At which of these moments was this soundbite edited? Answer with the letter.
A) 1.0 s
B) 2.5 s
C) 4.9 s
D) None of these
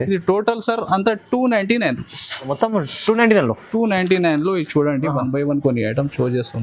B